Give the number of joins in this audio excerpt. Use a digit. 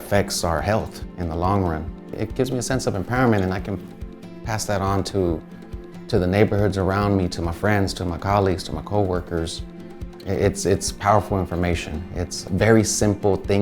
1